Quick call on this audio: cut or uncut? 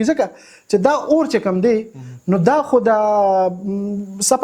uncut